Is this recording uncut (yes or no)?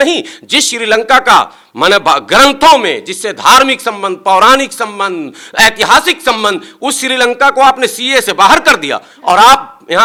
yes